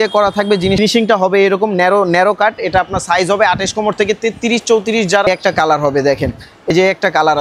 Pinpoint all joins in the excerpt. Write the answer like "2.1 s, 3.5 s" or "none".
0.8 s, 5.2 s, 6.7 s